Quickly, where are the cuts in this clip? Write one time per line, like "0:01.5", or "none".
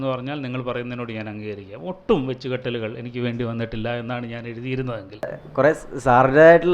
0:05.4

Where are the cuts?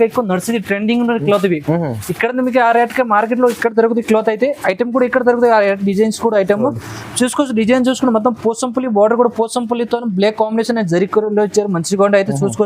none

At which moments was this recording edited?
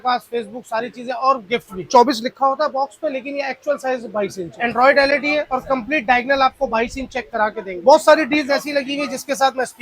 0:01.8
0:04.5
0:07.7

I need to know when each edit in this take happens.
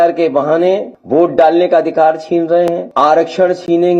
0:00.9
0:02.8

